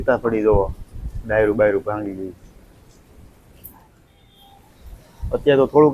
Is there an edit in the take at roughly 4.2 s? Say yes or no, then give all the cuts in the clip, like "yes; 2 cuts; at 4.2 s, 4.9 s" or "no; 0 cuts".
yes; 1 cut; at 4.2 s